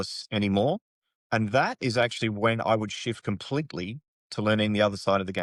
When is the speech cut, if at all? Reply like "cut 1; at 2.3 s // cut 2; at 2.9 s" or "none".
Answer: none

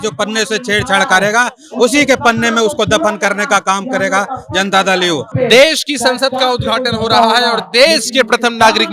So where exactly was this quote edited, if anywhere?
cut 1; at 5.3 s

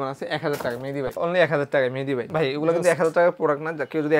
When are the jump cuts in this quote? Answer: cut 1; at 1.1 s // cut 2; at 2.2 s

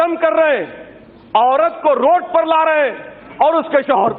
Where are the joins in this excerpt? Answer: none

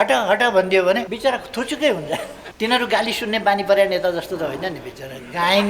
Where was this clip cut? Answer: cut 1; at 1.1 s // cut 2; at 2.4 s

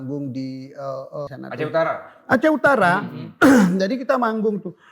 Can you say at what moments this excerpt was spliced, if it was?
cut 1; at 1.3 s

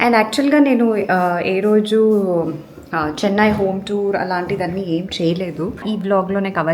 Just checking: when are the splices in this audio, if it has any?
cut 1; at 5.8 s

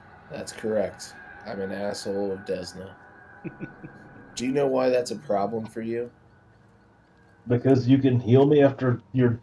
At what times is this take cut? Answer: none

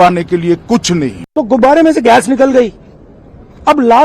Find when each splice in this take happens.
cut 1; at 1.2 s

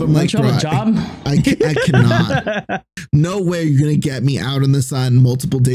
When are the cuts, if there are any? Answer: cut 1; at 2.9 s

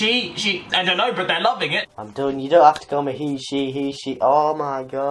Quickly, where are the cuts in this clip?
none

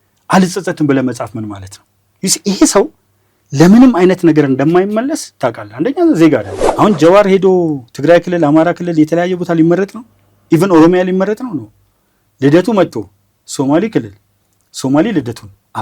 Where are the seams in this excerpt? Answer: cut 1; at 6.6 s

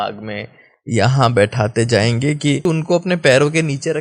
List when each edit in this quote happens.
cut 1; at 2.6 s

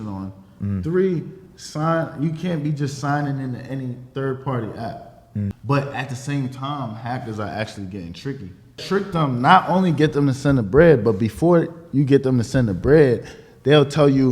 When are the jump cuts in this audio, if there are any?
cut 1; at 5.5 s // cut 2; at 8.8 s

